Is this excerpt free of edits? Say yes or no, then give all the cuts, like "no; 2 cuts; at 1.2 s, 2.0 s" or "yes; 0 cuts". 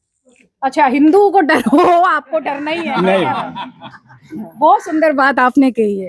yes; 0 cuts